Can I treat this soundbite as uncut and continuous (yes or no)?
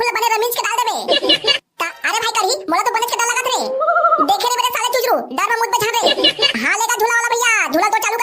no